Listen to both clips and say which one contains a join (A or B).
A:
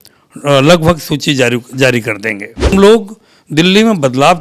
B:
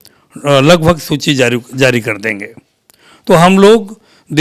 A